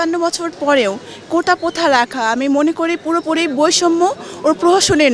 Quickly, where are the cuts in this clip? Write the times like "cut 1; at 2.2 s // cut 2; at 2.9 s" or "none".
none